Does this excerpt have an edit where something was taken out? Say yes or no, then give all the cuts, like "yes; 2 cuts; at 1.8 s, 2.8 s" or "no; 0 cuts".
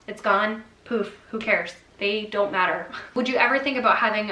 no; 0 cuts